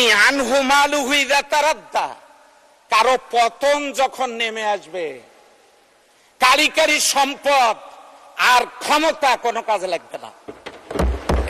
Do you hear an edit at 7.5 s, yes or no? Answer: no